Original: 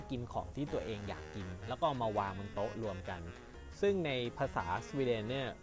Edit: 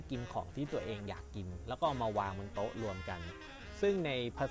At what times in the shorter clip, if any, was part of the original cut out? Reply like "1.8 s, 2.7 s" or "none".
none